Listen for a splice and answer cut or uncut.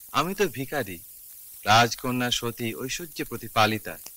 uncut